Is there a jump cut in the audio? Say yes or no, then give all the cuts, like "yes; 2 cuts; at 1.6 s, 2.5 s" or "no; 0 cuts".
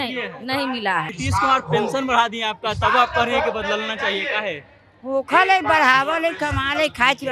yes; 1 cut; at 1.2 s